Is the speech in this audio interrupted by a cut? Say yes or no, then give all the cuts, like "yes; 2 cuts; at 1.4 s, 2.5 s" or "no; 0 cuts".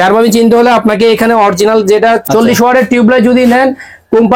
yes; 1 cut; at 2.2 s